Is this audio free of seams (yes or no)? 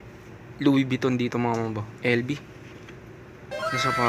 yes